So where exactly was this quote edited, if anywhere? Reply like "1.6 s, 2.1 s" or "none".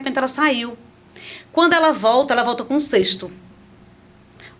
none